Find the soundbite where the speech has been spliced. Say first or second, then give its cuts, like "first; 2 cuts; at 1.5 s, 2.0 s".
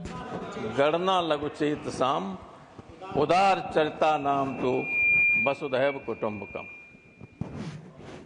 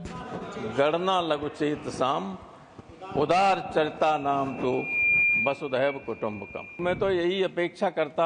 second; 1 cut; at 6.8 s